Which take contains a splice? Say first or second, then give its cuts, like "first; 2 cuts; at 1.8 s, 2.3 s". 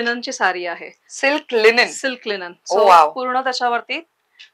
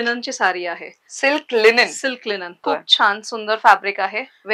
second; 1 cut; at 2.6 s